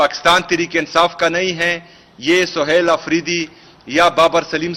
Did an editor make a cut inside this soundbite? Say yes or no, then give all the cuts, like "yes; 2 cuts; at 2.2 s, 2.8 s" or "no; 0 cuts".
no; 0 cuts